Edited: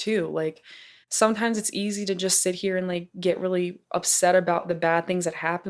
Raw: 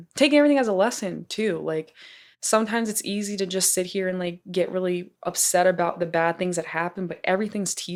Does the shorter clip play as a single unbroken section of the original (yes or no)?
yes